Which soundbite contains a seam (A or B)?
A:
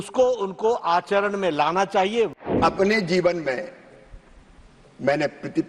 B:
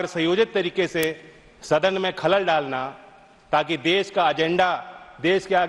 A